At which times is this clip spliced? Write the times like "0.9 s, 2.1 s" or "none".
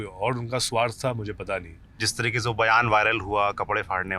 2.1 s

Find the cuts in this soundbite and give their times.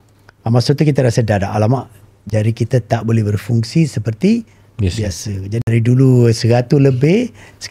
5.6 s

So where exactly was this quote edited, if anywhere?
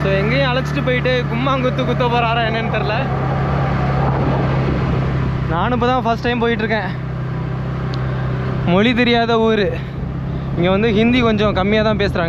none

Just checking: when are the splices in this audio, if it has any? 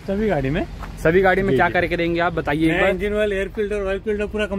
none

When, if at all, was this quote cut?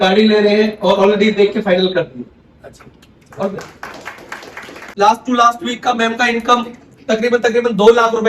4.8 s

